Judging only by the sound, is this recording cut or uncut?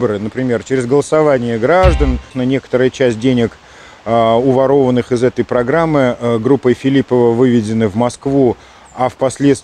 cut